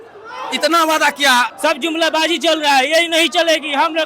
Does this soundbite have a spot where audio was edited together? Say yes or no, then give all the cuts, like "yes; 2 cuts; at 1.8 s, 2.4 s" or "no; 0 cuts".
yes; 1 cut; at 1.5 s